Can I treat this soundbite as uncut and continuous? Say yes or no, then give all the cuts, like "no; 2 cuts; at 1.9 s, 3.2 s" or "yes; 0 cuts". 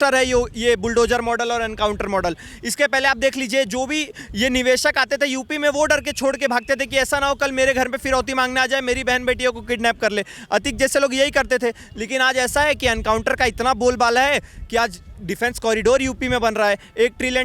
yes; 0 cuts